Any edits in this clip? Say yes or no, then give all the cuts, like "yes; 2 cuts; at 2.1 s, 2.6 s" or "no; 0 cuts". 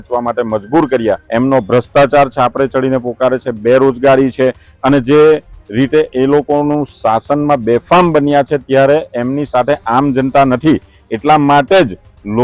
yes; 1 cut; at 1.2 s